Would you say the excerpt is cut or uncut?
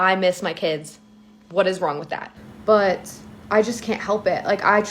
cut